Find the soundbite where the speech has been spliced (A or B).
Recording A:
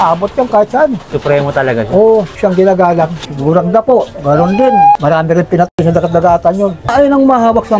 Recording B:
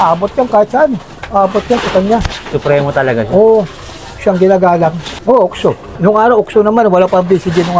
A